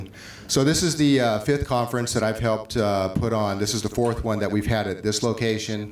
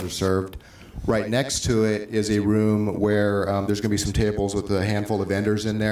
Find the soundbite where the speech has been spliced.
first; 1 cut; at 4.7 s

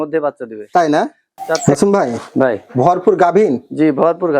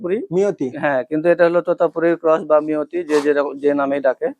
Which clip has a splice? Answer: first; 1 cut; at 1.6 s

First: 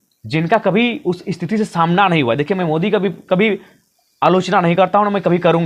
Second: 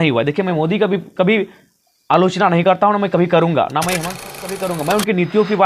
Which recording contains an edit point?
second; 1 cut; at 4.7 s

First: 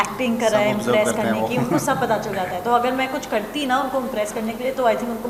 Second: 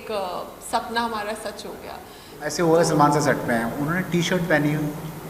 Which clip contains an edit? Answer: second; 1 cut; at 2.6 s

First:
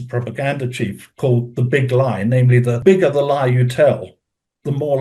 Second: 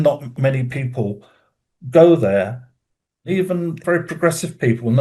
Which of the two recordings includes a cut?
second; 1 cut; at 3.3 s

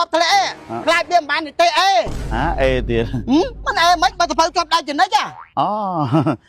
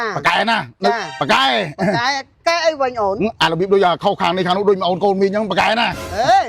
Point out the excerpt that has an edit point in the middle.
second; 1 cut; at 1.1 s

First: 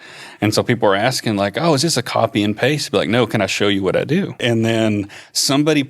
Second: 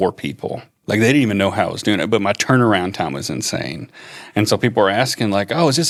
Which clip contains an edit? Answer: first; 1 cut; at 4.3 s

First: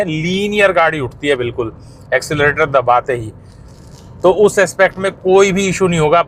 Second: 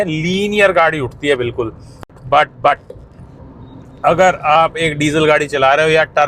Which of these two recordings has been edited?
second; 1 cut; at 2.1 s

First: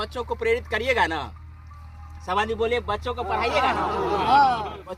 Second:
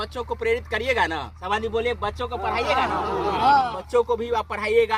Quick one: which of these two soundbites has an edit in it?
second; 2 cuts; at 1.3 s, 3.8 s

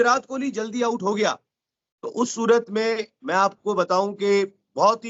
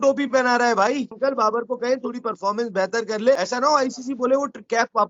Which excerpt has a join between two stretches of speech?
second; 2 cuts; at 1.1 s, 3.4 s

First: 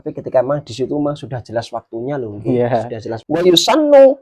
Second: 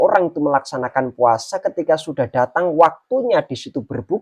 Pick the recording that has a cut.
first; 1 cut; at 3.2 s

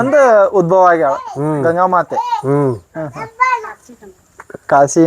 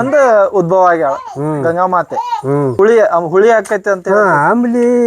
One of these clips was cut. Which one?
second; 1 cut; at 2.7 s

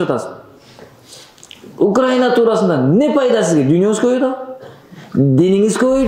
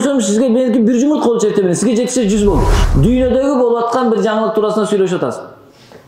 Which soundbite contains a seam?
second; 1 cut; at 2.8 s

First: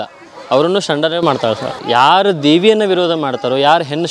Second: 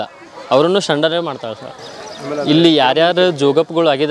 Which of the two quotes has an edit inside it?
first; 1 cut; at 1.7 s

